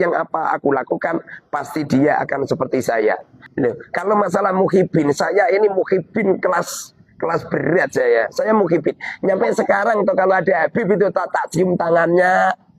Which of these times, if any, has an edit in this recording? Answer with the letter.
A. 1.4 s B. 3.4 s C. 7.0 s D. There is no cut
B